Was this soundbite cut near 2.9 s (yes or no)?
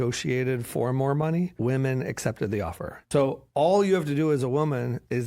yes